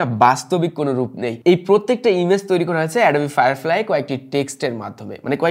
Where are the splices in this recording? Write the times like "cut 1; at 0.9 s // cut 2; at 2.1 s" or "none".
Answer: cut 1; at 1.3 s